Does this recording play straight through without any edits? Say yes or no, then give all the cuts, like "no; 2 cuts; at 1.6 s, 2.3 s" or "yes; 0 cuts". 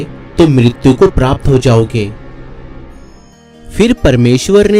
yes; 0 cuts